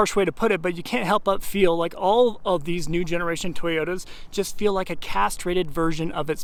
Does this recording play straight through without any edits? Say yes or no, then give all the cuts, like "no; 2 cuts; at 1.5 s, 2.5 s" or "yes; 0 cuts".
yes; 0 cuts